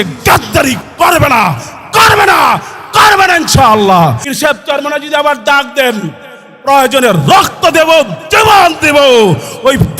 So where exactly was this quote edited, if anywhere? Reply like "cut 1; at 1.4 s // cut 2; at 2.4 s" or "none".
cut 1; at 4.3 s